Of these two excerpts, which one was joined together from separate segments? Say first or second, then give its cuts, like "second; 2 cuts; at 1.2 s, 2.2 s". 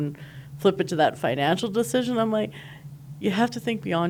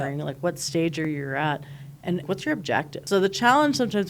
second; 1 cut; at 2.2 s